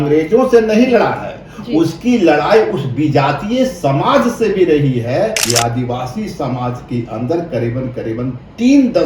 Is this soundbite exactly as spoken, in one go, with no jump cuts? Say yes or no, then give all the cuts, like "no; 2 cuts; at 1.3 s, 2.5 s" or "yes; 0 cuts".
no; 1 cut; at 5.4 s